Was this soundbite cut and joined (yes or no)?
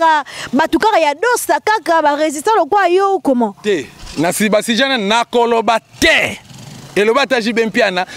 no